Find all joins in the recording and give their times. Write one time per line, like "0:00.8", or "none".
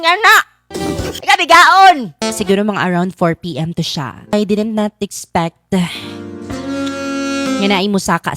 0:02.2
0:04.3